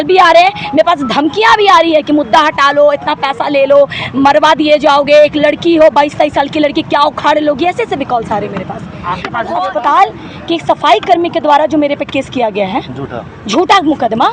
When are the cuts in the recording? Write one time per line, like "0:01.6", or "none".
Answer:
0:09.5